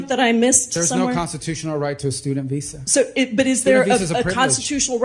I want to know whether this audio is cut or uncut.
uncut